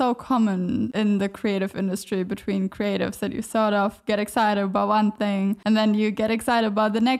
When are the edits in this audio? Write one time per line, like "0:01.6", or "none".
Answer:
0:00.9
0:05.6